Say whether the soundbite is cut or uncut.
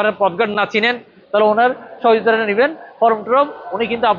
uncut